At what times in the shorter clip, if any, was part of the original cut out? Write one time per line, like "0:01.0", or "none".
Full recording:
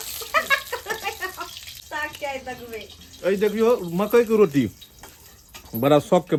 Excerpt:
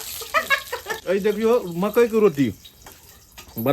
0:00.9